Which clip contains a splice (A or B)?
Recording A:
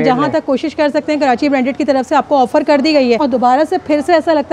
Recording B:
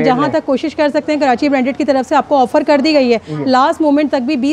A